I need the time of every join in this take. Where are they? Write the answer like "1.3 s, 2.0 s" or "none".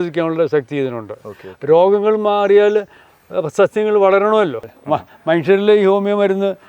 4.7 s